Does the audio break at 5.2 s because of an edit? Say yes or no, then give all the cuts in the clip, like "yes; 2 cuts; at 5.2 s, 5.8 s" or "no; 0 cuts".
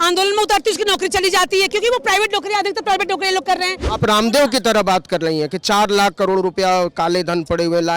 no; 1 cut; at 3.8 s